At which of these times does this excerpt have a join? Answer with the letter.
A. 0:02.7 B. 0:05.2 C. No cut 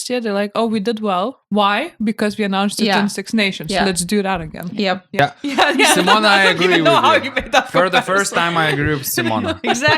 B